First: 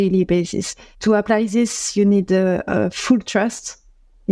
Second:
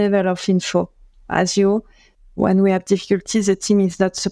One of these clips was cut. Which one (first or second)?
second